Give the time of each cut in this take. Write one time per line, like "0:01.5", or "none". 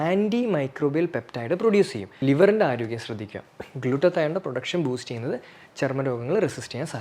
0:02.0